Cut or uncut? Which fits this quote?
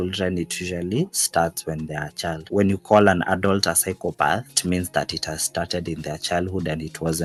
uncut